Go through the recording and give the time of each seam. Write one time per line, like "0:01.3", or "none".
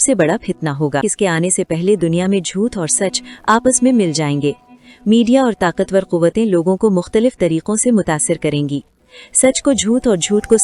0:01.1